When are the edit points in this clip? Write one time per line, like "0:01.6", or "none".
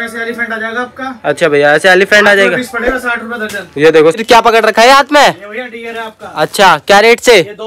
0:04.2